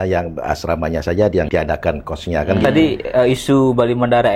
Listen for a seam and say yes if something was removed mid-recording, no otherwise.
yes